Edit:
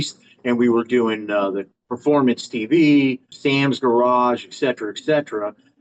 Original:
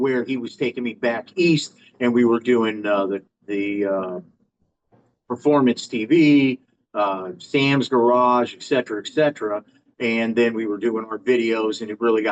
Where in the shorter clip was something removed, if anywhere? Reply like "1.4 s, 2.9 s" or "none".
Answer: 1.8 s, 3.3 s